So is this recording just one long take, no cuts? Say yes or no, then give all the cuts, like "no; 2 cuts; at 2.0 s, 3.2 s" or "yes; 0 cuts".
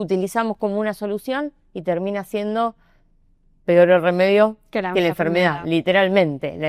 yes; 0 cuts